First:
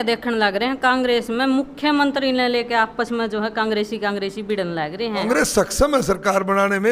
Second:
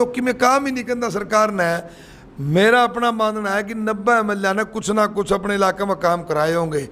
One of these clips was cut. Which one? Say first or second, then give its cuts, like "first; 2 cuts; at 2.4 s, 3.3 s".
first; 1 cut; at 5.1 s